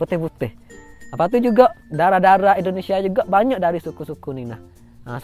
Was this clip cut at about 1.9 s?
yes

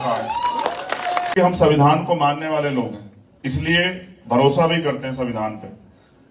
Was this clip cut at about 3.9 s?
no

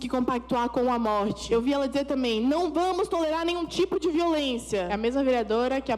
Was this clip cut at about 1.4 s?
yes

